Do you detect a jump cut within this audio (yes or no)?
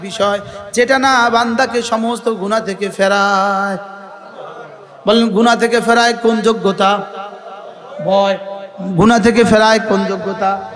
no